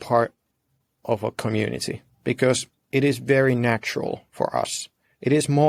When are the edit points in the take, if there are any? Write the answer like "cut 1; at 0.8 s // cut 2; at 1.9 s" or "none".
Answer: none